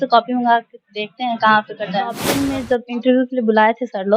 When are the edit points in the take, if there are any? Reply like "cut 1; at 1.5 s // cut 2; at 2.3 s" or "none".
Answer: cut 1; at 2.3 s